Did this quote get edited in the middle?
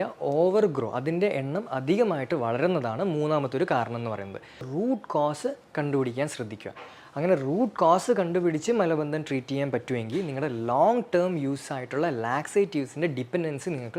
yes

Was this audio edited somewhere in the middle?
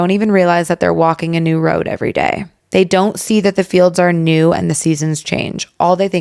no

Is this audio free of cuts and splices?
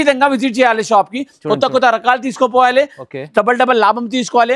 yes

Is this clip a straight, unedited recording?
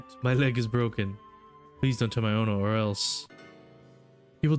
yes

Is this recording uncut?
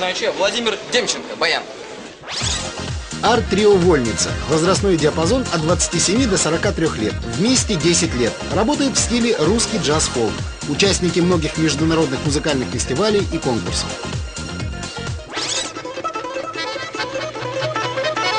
no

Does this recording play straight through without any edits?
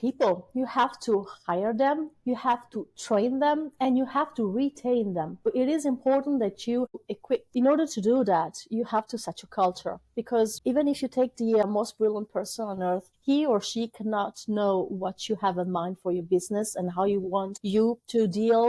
no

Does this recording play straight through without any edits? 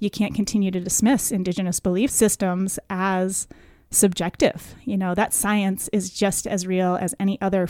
yes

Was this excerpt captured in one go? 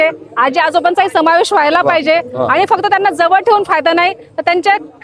yes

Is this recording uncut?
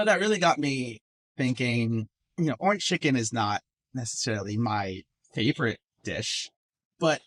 no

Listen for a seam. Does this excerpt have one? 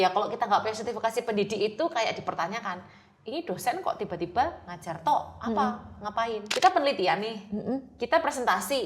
yes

